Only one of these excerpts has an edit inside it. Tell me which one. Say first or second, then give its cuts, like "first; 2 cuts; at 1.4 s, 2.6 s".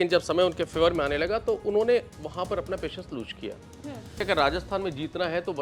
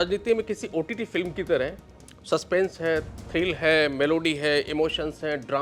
first; 1 cut; at 4.2 s